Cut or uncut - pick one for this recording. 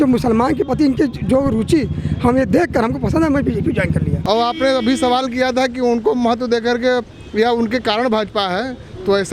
cut